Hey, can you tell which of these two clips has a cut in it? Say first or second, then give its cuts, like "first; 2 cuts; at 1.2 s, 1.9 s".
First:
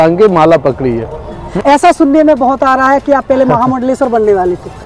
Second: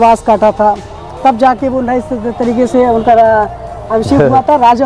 first; 1 cut; at 1.4 s